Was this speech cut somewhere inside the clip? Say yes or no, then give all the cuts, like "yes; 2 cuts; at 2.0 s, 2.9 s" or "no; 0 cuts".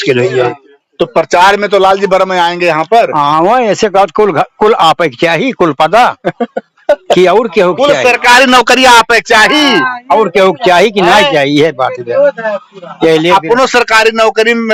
no; 0 cuts